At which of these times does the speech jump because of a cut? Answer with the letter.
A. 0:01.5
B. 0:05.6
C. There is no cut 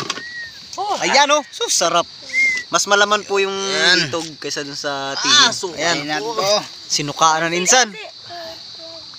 C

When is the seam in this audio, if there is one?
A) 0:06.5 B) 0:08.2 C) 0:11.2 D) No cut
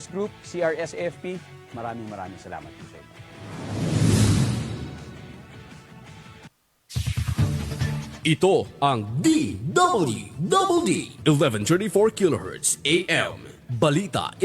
A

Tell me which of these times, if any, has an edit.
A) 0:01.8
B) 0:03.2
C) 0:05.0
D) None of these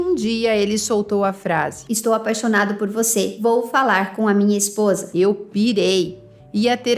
D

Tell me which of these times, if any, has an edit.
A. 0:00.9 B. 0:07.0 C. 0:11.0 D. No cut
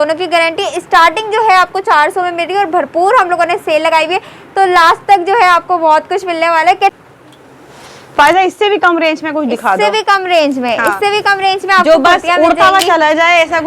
B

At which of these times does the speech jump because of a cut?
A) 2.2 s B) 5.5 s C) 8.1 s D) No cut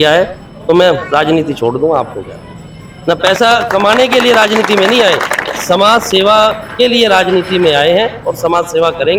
D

